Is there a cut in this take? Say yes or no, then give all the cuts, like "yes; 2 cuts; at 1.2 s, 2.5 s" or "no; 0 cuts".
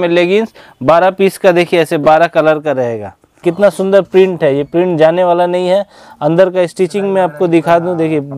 yes; 1 cut; at 3.4 s